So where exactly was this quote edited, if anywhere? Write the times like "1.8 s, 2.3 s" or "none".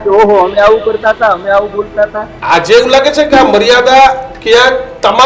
2.3 s